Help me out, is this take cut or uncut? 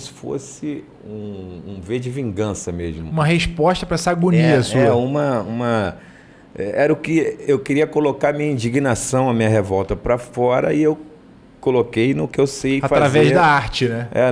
uncut